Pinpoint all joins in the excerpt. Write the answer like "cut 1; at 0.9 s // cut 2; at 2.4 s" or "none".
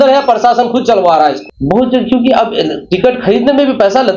cut 1; at 1.4 s

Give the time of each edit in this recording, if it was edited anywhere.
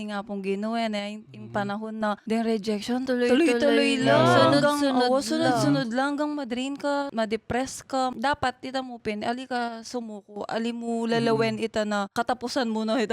cut 1; at 2.2 s // cut 2; at 3.0 s // cut 3; at 7.1 s // cut 4; at 8.1 s // cut 5; at 12.1 s

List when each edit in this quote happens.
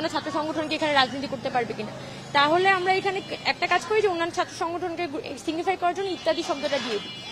none

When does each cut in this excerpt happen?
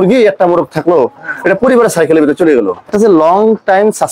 cut 1; at 2.8 s

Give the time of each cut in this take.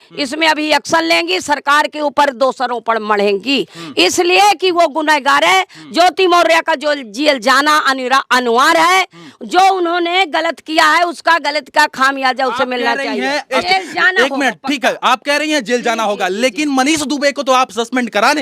none

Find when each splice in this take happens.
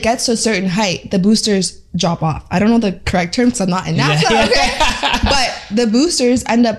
none

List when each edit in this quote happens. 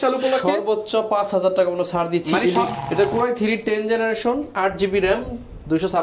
cut 1; at 2.7 s

